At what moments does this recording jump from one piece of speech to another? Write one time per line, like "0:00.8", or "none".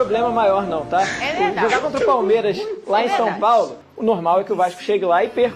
0:03.8